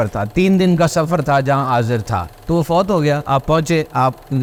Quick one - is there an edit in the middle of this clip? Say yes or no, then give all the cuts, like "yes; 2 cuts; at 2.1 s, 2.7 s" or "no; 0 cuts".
no; 0 cuts